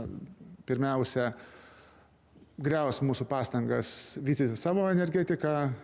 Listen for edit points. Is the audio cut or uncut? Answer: uncut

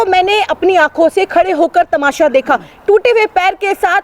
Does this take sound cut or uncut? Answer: uncut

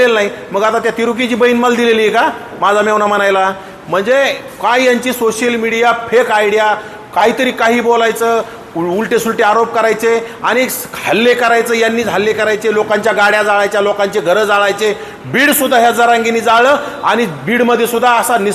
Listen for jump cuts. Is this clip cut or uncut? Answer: uncut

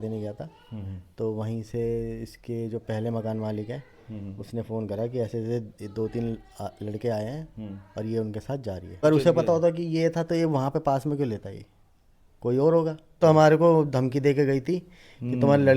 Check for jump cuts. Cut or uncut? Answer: cut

